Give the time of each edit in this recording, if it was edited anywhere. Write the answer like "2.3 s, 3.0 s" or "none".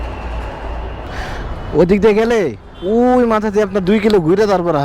1.1 s